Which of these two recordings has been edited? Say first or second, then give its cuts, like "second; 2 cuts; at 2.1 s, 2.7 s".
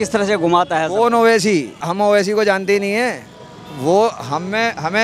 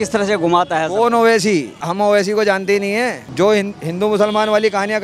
second; 1 cut; at 3.2 s